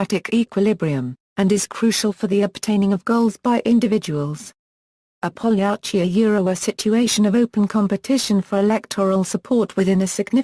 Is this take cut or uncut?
cut